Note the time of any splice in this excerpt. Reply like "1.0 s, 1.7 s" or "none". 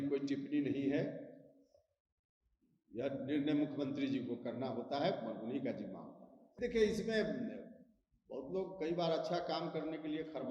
6.6 s